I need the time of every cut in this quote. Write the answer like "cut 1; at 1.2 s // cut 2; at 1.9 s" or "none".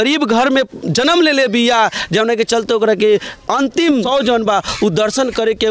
cut 1; at 4.0 s